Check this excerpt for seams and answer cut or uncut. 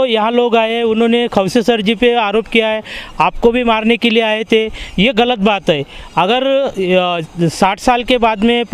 uncut